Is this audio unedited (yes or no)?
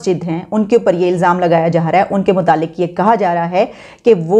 yes